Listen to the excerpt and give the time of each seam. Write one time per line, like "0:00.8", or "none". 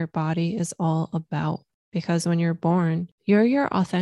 0:01.7
0:03.1

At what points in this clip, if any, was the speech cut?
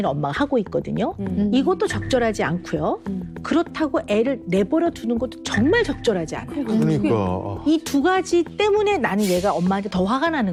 none

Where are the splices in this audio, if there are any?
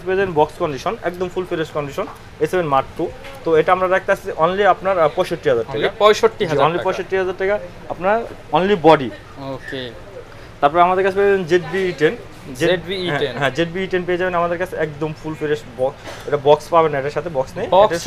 none

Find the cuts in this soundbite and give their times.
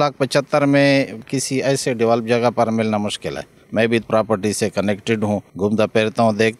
0:01.3
0:04.0
0:05.5

